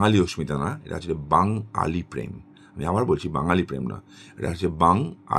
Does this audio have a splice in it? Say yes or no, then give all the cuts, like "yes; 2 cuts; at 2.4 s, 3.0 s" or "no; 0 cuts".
no; 0 cuts